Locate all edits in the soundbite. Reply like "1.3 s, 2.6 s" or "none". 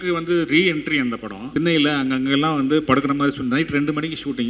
1.5 s